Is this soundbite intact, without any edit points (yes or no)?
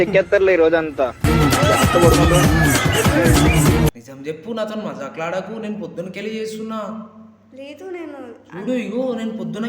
no